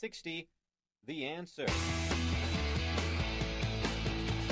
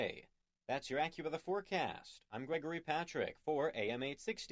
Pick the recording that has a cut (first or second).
first